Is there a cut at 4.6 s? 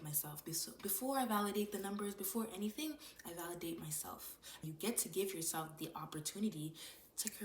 yes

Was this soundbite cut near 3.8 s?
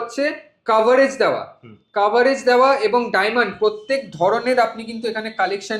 no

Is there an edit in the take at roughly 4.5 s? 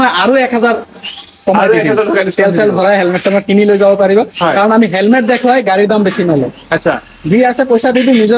no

